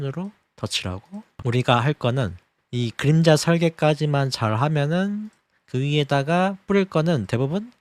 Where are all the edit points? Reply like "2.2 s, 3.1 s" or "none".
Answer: 1.4 s